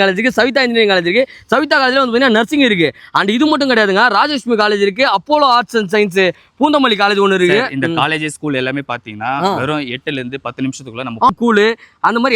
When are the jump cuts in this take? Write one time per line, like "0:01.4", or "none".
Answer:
0:11.3